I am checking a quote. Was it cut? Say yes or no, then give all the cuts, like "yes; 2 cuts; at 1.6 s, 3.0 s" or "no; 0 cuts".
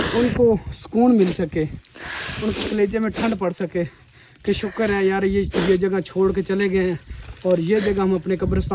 no; 0 cuts